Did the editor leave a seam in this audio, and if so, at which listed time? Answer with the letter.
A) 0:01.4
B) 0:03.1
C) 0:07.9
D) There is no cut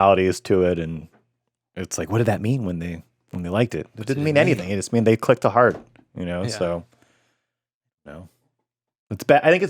D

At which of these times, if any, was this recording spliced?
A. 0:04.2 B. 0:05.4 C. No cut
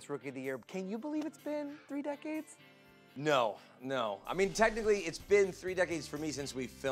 C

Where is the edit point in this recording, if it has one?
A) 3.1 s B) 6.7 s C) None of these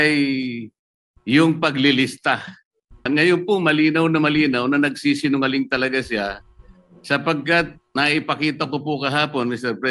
A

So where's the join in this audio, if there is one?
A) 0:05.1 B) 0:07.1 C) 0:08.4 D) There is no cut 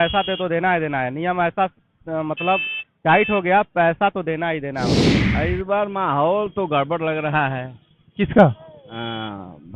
A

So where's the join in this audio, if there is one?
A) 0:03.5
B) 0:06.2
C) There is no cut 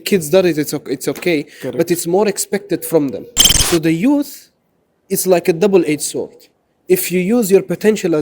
A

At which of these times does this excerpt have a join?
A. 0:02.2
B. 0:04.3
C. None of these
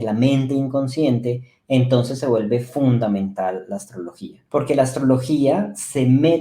B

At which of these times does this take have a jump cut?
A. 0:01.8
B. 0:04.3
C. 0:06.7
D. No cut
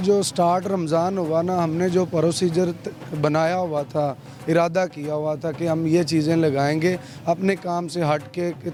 D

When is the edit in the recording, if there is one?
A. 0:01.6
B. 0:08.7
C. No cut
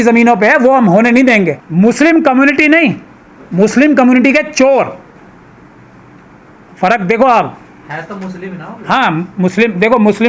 A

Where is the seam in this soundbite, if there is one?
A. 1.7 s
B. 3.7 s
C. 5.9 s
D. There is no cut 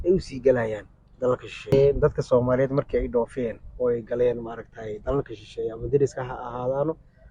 A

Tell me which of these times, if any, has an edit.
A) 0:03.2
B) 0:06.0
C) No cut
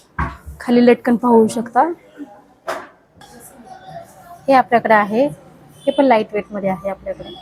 A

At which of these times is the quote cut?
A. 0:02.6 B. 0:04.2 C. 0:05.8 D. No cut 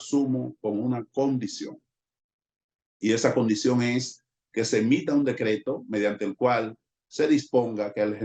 D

